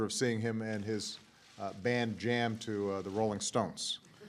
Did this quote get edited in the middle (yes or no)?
yes